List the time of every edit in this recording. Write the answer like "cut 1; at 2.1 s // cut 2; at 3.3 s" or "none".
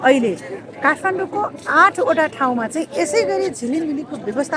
none